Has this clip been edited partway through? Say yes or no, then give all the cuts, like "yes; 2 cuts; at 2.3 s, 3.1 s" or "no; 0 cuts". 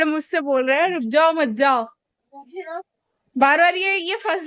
no; 0 cuts